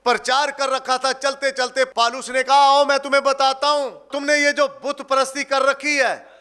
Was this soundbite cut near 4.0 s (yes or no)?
yes